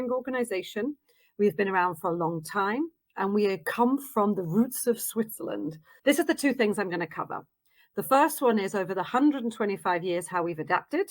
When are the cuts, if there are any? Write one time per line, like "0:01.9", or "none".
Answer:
0:05.8

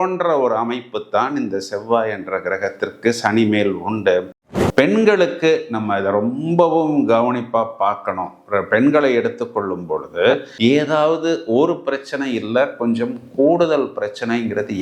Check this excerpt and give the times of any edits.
0:04.3
0:10.5

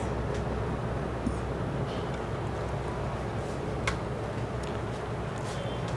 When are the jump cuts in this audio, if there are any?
0:02.1

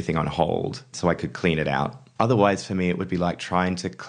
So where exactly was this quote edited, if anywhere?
0:00.9
0:02.0

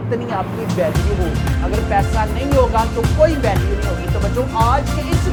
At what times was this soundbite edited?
none

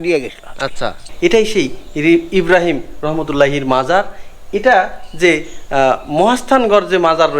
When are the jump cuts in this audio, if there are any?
0:01.0

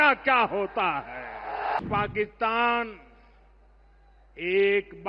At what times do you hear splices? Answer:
0:01.8

